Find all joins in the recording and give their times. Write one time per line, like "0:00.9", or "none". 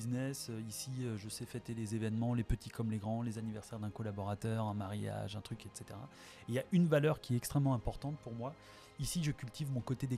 none